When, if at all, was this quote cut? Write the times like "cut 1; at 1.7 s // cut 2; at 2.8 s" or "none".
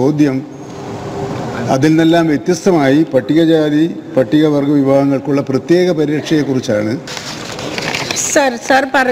cut 1; at 7.1 s